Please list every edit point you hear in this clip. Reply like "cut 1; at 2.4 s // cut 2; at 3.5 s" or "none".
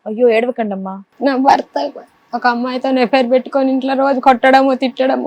cut 1; at 1.1 s